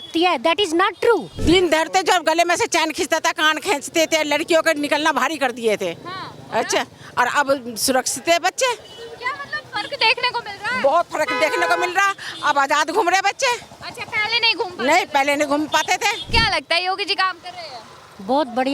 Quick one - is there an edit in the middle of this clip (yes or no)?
yes